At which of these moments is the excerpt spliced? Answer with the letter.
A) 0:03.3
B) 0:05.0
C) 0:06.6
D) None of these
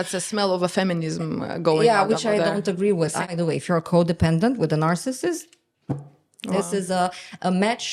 A